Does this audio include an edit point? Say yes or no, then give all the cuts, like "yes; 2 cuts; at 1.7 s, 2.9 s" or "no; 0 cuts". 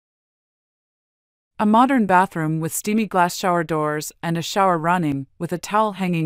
no; 0 cuts